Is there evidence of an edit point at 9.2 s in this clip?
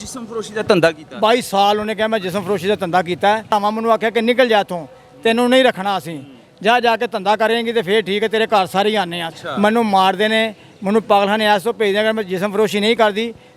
yes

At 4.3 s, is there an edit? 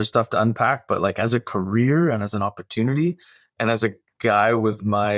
no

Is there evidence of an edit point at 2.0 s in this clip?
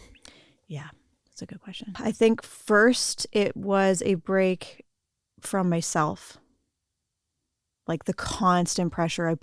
yes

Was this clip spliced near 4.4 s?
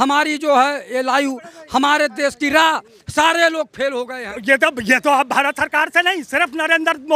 yes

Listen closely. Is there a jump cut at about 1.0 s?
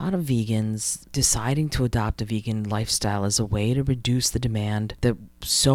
yes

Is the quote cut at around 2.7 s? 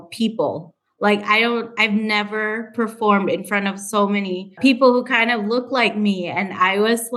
no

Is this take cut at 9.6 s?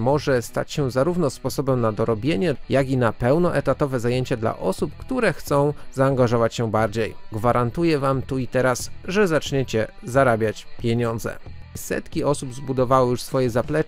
no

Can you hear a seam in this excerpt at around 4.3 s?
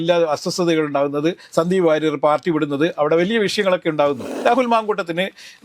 yes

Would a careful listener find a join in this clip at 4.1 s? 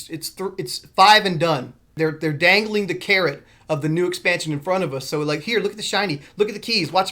no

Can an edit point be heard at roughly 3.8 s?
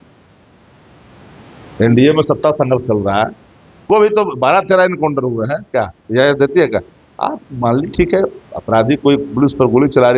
yes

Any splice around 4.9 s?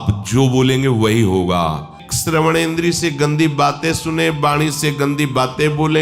no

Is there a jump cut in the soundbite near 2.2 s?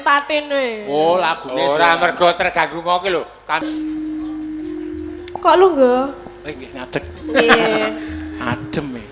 no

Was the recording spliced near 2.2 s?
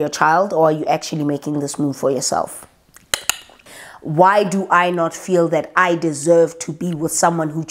no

